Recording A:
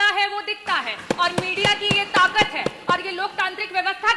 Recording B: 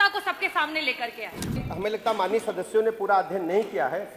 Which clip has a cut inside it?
B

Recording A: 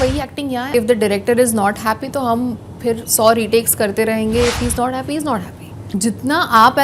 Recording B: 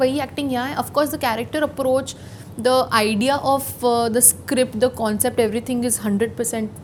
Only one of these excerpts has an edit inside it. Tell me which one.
A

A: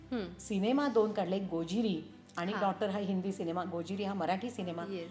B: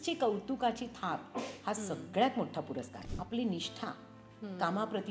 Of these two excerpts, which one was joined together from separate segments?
B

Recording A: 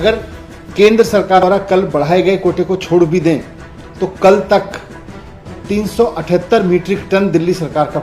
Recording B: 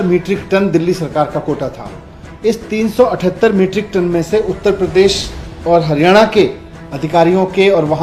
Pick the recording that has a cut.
A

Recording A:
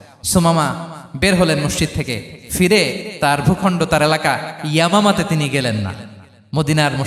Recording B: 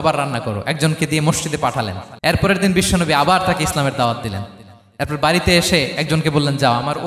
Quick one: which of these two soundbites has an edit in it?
B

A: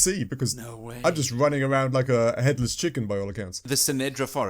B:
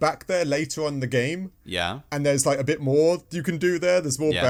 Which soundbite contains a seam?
A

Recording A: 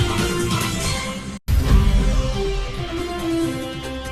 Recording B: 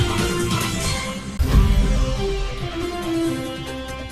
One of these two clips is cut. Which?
B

